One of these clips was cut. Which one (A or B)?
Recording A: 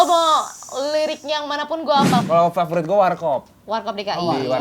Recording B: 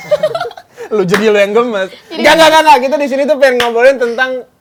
A